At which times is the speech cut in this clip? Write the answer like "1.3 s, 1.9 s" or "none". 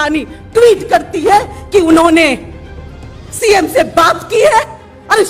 none